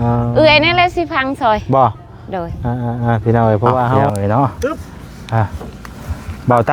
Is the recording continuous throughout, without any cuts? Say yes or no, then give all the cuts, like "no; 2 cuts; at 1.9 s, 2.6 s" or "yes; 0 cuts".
no; 1 cut; at 4.1 s